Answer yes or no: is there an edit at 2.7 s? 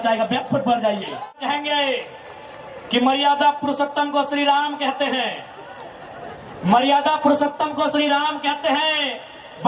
no